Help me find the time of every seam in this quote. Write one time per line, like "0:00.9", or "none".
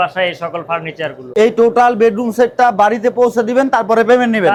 none